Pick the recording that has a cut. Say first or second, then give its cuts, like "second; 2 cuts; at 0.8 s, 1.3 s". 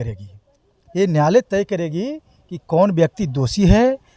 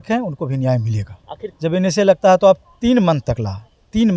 second; 1 cut; at 1.4 s